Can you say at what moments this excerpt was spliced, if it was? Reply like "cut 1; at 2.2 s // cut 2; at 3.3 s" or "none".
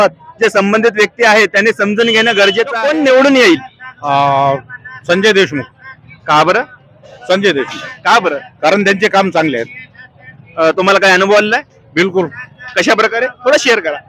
cut 1; at 2.7 s